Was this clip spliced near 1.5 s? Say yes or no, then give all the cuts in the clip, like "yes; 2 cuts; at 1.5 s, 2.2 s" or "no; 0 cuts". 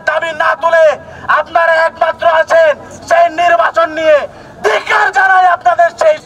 no; 0 cuts